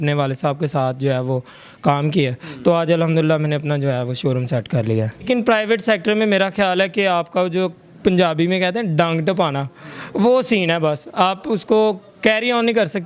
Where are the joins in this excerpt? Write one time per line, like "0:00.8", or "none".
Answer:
0:05.2